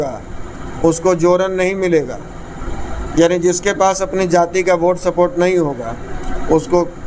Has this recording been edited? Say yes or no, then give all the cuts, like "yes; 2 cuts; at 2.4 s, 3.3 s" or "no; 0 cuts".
no; 0 cuts